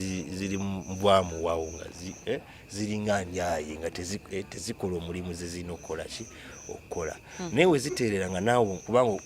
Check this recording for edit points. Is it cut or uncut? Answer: uncut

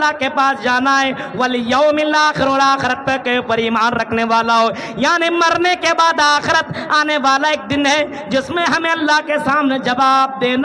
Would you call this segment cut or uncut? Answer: uncut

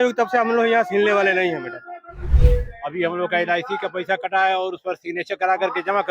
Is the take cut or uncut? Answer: cut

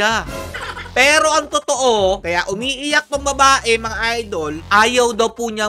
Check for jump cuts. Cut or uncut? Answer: uncut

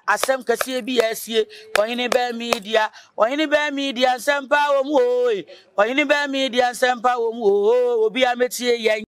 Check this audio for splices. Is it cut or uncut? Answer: uncut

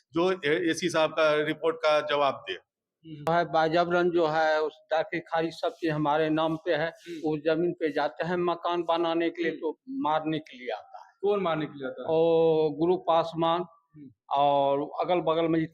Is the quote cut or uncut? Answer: cut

